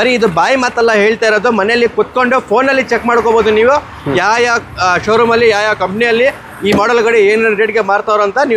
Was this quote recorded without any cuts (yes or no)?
yes